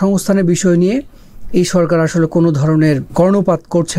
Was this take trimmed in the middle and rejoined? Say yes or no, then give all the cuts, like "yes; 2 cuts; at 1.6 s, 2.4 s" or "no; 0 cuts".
yes; 1 cut; at 3.1 s